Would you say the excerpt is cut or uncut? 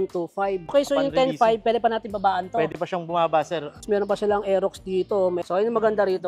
cut